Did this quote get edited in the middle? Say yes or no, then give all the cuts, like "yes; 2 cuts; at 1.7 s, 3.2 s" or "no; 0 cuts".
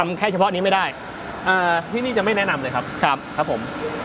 no; 0 cuts